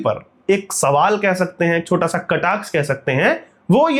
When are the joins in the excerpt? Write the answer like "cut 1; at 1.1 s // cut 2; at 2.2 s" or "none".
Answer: none